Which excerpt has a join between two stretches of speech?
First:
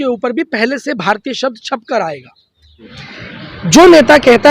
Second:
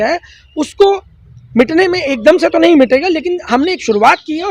first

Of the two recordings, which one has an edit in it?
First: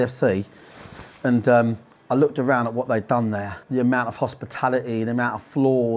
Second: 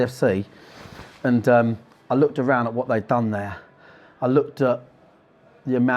first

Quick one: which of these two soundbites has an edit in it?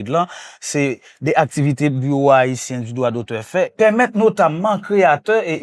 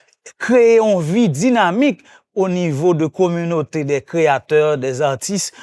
first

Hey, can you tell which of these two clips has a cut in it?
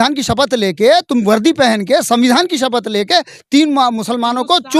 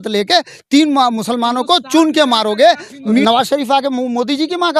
second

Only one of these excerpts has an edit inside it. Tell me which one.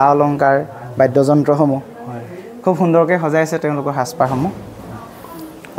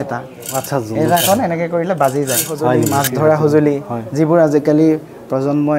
second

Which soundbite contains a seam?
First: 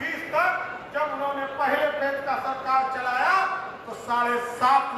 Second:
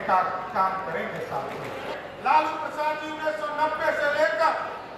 second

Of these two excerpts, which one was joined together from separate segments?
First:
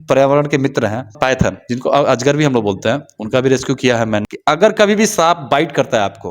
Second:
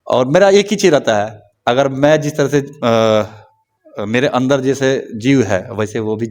first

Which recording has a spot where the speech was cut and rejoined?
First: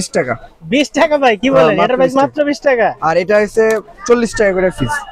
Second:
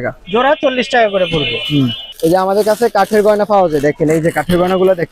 second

